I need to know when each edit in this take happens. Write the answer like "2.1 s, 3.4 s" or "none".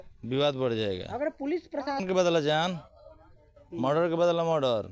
2.0 s